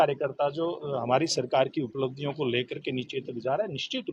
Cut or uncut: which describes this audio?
uncut